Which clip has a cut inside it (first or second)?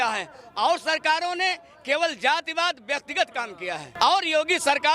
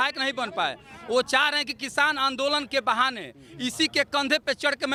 first